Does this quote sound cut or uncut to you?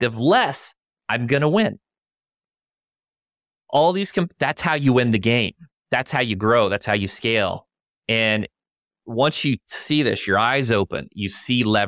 uncut